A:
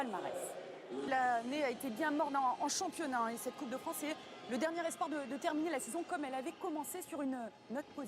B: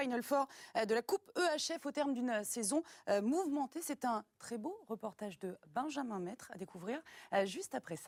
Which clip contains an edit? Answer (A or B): A